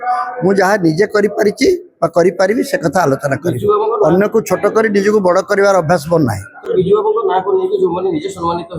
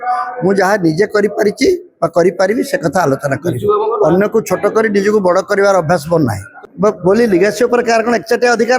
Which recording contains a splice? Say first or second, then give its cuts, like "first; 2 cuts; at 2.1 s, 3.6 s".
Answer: second; 1 cut; at 6.5 s